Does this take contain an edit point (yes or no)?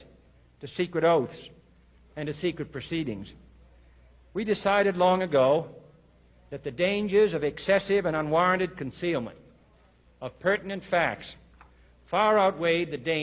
yes